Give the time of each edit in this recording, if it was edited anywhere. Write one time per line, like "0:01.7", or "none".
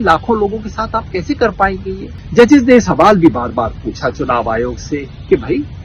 0:02.1